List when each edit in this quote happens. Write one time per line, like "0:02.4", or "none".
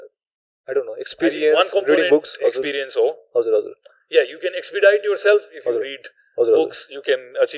none